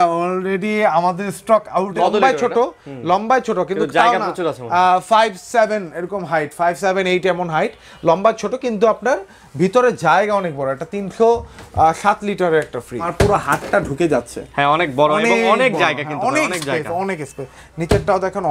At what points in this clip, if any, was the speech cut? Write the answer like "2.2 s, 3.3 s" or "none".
1.9 s, 13.1 s